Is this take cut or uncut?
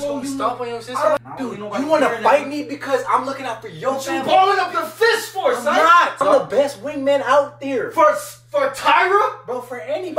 cut